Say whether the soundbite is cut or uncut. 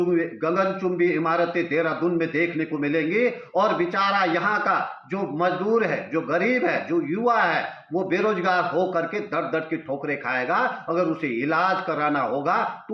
uncut